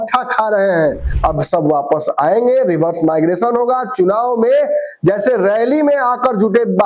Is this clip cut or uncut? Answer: cut